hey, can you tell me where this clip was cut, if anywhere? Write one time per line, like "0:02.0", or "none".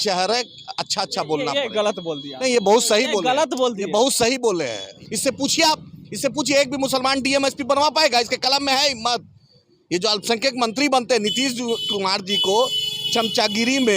0:04.9